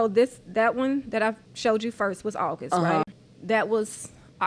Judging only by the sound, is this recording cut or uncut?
cut